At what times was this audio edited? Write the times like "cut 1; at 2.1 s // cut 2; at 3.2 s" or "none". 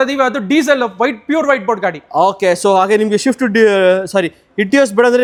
none